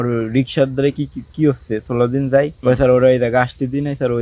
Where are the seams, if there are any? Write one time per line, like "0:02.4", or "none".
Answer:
0:02.5